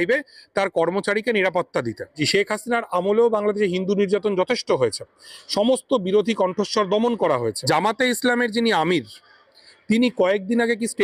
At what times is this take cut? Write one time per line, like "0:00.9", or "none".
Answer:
0:02.2
0:07.6